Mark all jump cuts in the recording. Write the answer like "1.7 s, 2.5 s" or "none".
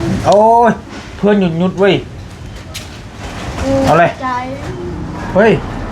none